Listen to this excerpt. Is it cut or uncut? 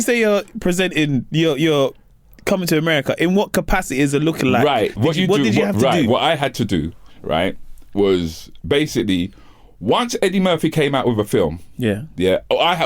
uncut